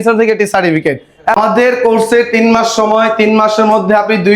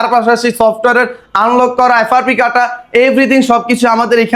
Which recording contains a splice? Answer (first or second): first